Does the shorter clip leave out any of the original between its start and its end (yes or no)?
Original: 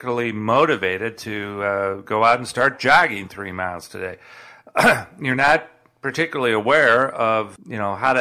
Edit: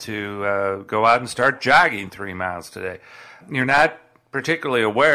yes